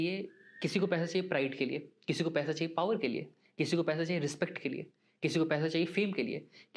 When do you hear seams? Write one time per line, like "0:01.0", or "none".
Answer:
none